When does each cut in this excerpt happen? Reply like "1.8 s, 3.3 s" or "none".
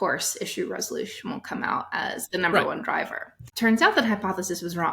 3.4 s

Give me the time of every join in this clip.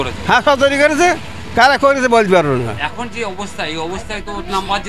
none

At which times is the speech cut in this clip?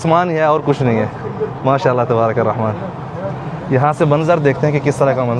none

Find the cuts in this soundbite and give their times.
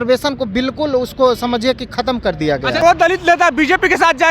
2.8 s

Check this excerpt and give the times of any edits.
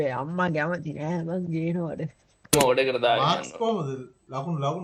2.5 s

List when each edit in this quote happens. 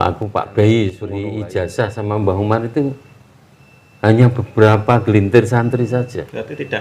1.1 s

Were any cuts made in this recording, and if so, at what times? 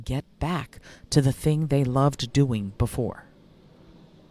none

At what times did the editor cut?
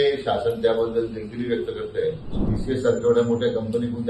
2.5 s

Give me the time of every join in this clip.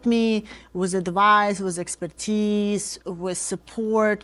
none

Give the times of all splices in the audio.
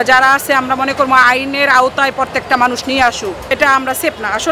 3.4 s

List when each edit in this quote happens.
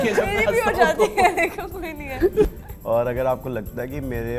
2.5 s

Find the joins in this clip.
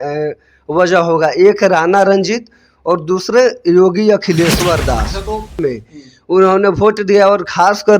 5.6 s

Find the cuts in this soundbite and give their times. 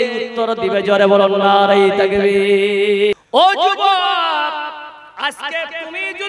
3.1 s

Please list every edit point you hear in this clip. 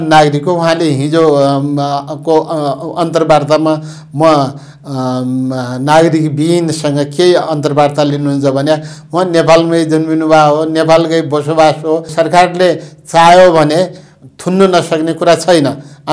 12.1 s

